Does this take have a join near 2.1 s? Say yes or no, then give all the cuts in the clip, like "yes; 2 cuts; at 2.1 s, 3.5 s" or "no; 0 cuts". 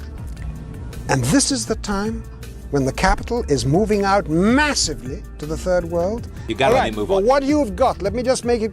no; 1 cut; at 6.4 s